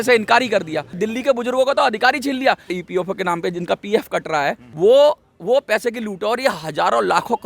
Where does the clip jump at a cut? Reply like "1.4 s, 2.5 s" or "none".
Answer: 1.0 s, 2.8 s, 4.6 s